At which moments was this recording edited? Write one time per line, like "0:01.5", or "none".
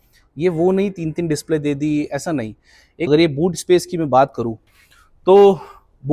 0:03.1